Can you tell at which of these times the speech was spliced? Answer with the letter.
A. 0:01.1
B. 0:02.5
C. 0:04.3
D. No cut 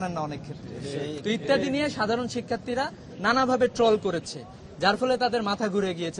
D